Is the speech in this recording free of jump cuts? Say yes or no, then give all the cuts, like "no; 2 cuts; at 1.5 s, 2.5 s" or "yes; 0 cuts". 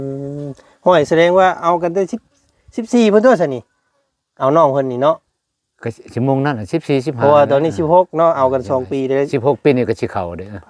yes; 0 cuts